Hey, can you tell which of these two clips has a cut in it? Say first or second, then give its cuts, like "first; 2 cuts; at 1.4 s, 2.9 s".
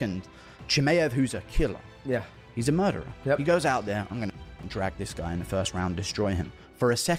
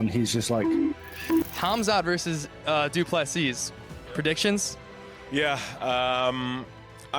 second; 1 cut; at 1.4 s